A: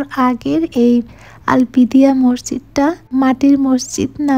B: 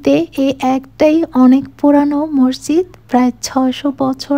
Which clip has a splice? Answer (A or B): A